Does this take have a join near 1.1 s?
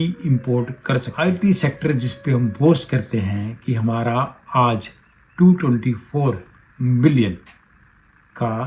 yes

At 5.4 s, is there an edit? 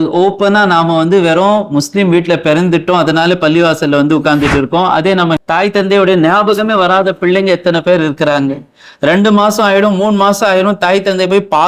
yes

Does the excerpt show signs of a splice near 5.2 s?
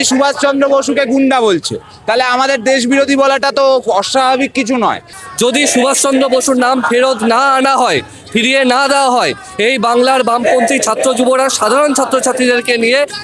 yes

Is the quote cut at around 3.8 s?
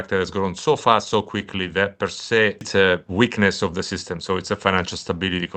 no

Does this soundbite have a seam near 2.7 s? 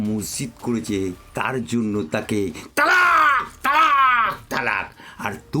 no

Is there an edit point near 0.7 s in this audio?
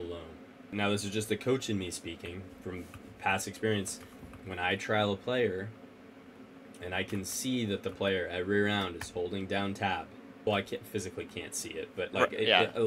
yes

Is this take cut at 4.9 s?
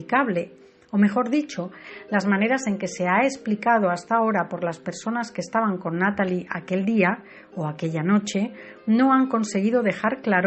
no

